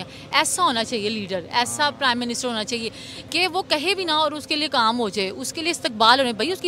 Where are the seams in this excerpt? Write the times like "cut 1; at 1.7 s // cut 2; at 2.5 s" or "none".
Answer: none